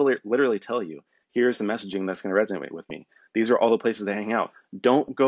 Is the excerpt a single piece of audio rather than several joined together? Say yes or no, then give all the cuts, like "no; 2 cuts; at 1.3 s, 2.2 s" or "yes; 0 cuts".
no; 1 cut; at 1.2 s